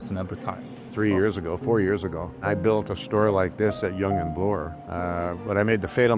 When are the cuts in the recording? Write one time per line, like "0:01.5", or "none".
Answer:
none